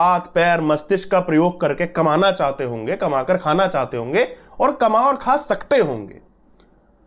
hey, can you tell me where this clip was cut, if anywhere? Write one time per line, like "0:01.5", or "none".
none